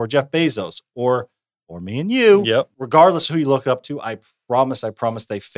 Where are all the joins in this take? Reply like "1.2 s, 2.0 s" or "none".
2.8 s